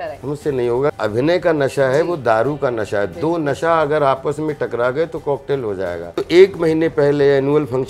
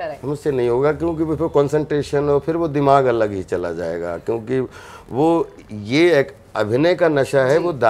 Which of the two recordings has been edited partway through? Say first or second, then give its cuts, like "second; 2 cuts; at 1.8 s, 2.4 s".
first; 2 cuts; at 0.9 s, 6.1 s